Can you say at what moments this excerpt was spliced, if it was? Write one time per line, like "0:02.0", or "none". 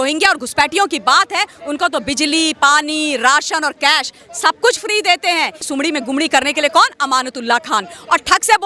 0:05.7